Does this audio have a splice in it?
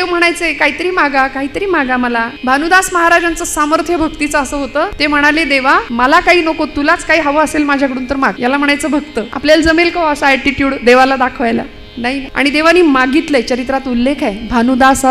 yes; 6 cuts; at 2.3 s, 4.9 s, 5.9 s, 8.4 s, 9.3 s, 12.2 s

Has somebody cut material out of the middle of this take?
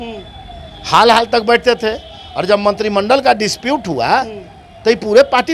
no; 0 cuts

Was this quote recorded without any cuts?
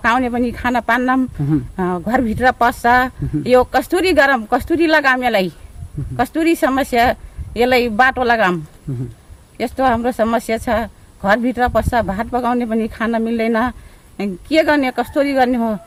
yes; 0 cuts

